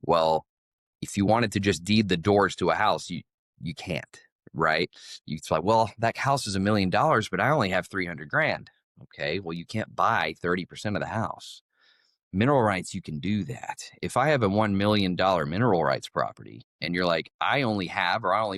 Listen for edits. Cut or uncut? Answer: uncut